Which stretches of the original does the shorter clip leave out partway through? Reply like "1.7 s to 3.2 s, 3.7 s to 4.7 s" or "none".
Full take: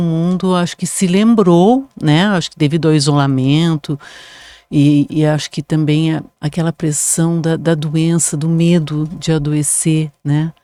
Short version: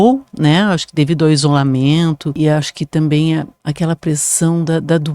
4.0 s to 5.1 s